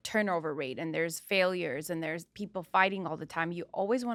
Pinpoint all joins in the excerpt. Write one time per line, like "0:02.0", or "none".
none